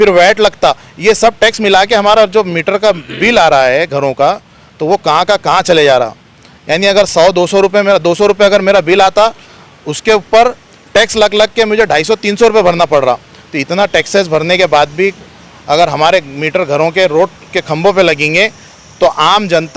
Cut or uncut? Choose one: uncut